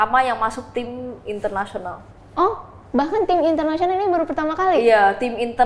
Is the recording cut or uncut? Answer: uncut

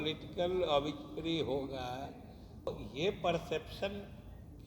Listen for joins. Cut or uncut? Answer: cut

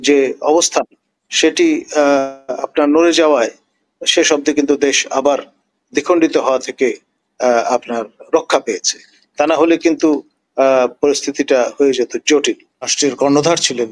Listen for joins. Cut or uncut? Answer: cut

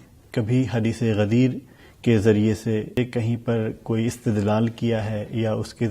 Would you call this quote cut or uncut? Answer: cut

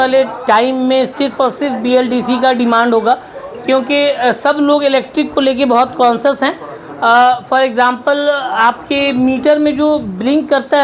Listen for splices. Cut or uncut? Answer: uncut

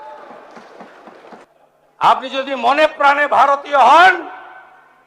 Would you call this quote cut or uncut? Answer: cut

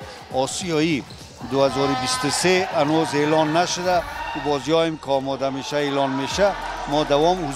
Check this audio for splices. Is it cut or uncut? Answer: uncut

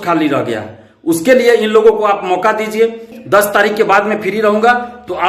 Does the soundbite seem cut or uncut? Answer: cut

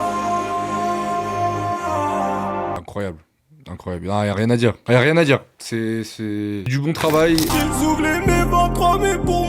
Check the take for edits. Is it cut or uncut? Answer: cut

